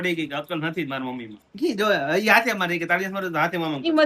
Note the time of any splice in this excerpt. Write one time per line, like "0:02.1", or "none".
none